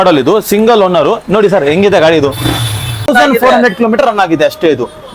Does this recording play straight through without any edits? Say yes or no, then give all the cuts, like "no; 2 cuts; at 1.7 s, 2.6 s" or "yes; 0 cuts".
no; 1 cut; at 3.1 s